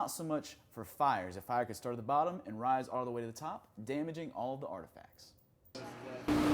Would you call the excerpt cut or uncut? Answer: cut